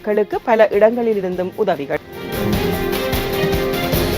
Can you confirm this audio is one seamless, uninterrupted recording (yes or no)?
no